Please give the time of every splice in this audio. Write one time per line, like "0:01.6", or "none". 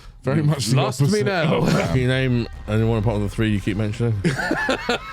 0:01.9